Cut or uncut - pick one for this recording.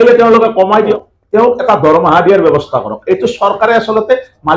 cut